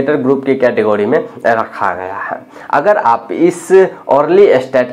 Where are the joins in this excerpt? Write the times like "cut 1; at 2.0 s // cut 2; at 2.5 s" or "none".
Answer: none